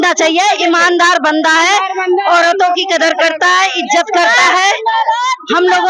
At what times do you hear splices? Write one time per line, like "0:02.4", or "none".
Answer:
none